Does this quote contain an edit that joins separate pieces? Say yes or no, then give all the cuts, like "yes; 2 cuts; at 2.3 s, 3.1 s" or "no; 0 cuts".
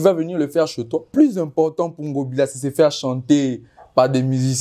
yes; 1 cut; at 1.1 s